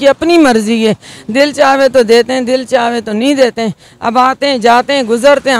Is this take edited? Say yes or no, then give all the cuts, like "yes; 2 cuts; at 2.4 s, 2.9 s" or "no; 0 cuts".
no; 0 cuts